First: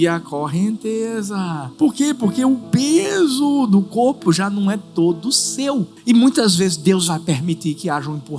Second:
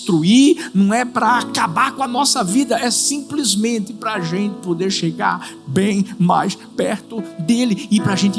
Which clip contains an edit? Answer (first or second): first